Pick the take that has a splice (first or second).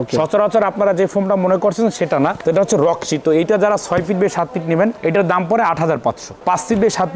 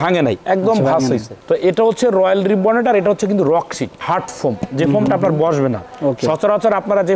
first